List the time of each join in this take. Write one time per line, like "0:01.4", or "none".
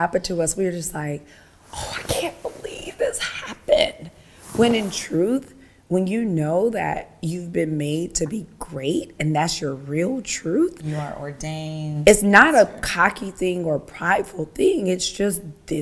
none